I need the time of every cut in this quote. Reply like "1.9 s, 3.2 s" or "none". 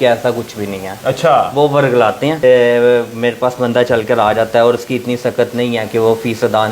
2.4 s

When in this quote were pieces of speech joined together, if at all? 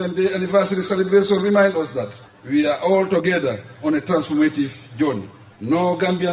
none

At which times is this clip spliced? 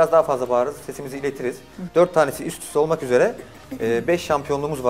1.7 s

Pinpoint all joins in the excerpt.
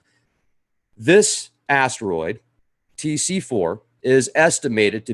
2.6 s

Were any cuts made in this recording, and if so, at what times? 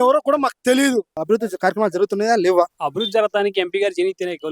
1.2 s, 2.8 s

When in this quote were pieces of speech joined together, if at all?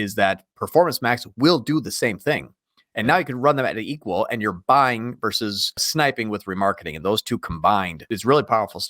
5.8 s, 8.0 s

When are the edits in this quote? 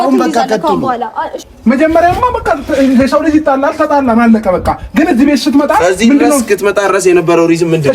1.3 s

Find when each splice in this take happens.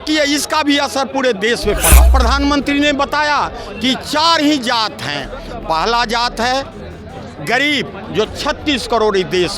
2.1 s

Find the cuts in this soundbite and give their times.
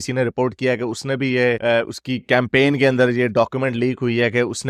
none

